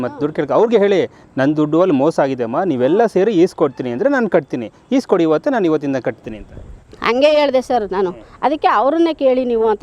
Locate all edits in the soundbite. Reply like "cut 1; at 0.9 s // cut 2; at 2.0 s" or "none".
none